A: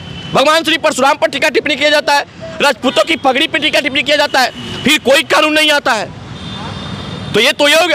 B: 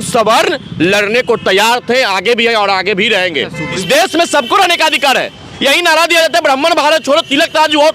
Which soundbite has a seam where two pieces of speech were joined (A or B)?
B